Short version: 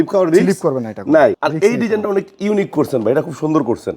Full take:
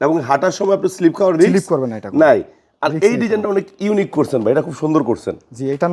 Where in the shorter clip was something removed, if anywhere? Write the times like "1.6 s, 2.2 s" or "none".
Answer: 1.4 s